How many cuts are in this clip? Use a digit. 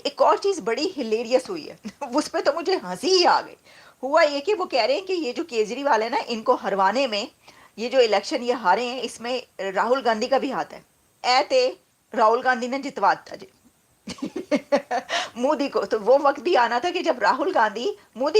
1